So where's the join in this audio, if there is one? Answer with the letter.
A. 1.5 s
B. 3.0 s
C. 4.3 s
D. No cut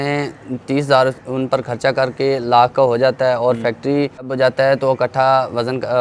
C